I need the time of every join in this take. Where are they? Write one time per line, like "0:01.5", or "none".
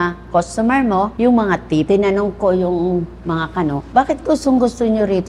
0:01.1
0:01.9
0:03.8